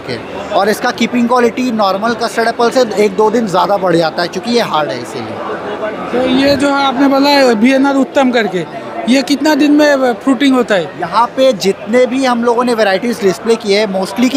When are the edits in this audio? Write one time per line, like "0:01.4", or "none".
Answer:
none